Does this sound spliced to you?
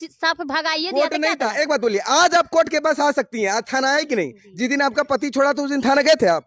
no; 0 cuts

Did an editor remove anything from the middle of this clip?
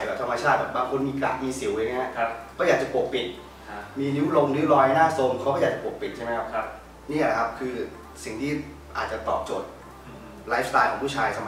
no; 0 cuts

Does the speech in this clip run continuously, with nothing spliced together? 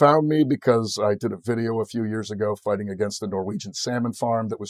yes; 0 cuts

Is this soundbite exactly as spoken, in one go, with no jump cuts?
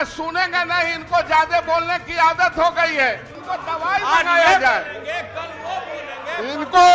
no; 1 cut; at 3.3 s

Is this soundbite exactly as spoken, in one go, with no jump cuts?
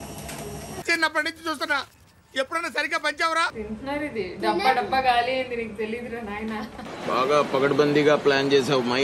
no; 1 cut; at 3.6 s

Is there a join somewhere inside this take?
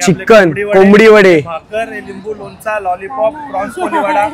no; 0 cuts

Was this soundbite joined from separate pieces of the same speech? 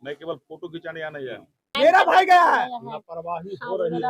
yes; 1 cut; at 1.6 s

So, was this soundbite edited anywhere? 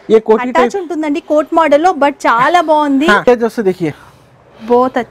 yes; 1 cut; at 3.3 s

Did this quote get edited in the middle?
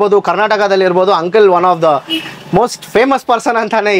no; 0 cuts

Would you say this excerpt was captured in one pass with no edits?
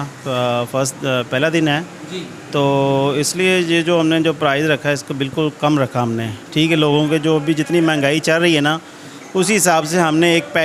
yes; 0 cuts

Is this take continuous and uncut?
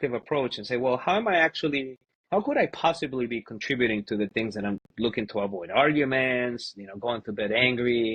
yes; 0 cuts

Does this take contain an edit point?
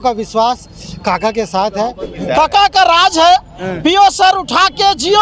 yes; 1 cut; at 2.0 s

